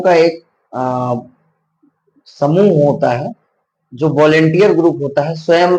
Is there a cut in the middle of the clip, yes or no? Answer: no